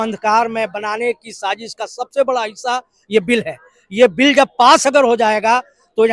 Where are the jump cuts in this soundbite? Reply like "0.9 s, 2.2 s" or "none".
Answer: none